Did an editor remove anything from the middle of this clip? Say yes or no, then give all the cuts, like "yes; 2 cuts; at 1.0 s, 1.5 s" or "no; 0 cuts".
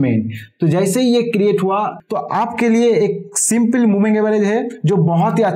yes; 1 cut; at 2.0 s